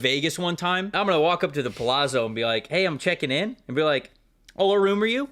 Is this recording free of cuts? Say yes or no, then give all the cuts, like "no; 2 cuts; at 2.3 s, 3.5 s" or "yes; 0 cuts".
no; 1 cut; at 0.9 s